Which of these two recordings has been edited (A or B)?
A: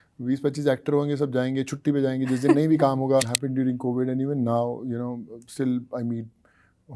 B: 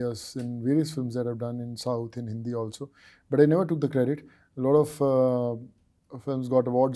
A